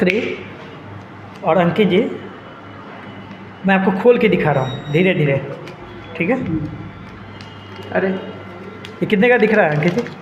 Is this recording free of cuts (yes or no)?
yes